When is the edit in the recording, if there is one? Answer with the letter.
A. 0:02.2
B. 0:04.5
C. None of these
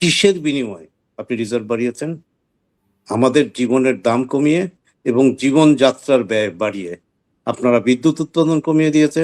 C